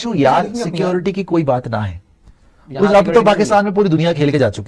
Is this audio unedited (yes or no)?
yes